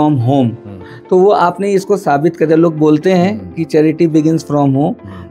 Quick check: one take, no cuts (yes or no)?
yes